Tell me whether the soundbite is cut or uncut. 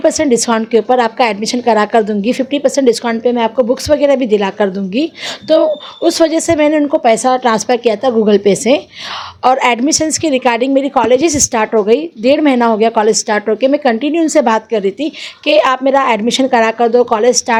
uncut